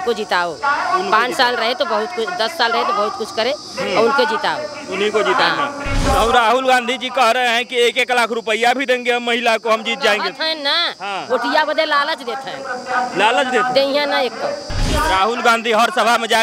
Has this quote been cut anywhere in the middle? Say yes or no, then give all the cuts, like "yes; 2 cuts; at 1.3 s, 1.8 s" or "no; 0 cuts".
yes; 2 cuts; at 6.0 s, 14.8 s